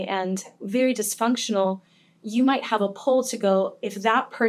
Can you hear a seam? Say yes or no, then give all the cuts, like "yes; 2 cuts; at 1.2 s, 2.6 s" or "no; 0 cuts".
no; 0 cuts